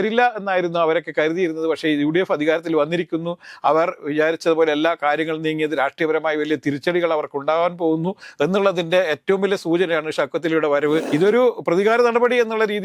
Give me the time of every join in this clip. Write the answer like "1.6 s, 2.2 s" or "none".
11.1 s